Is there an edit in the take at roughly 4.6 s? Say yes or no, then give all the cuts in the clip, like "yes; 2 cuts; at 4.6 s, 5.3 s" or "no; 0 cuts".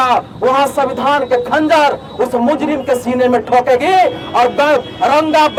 no; 0 cuts